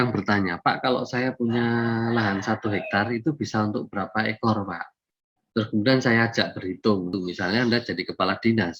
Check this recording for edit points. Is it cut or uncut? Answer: cut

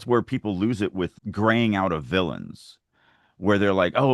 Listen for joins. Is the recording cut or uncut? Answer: cut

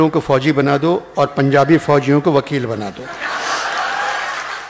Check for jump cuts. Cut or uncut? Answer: uncut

